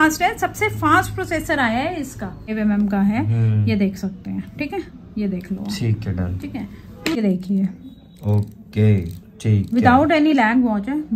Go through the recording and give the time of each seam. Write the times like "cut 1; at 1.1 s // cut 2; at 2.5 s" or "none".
cut 1; at 2.5 s // cut 2; at 7.2 s